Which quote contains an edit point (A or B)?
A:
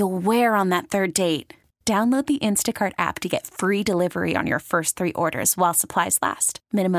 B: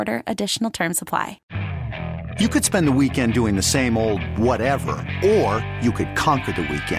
B